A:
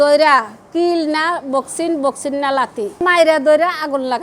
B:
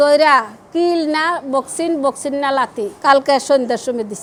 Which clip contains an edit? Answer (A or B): A